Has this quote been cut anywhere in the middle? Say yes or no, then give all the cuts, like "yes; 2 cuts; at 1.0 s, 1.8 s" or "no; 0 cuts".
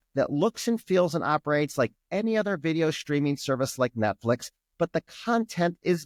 no; 0 cuts